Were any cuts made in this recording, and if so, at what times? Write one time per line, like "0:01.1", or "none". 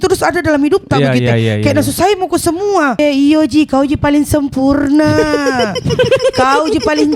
0:03.0